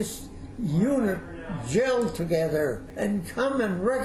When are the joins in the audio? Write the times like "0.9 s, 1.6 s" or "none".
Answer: 2.9 s